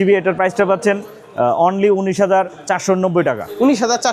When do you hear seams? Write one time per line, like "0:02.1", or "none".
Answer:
none